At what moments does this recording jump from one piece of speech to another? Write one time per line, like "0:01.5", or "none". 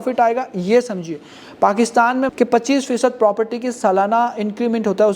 0:02.3